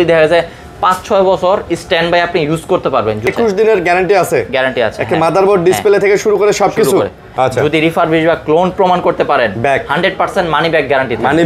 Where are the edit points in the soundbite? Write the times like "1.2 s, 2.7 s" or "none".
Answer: 3.3 s, 7.3 s